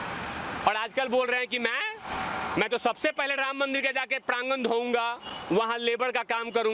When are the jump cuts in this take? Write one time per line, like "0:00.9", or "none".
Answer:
none